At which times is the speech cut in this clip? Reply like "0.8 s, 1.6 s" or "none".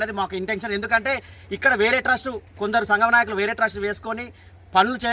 none